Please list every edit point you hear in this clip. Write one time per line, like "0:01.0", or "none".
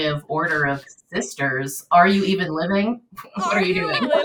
none